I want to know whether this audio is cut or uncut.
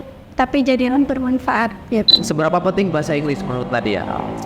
cut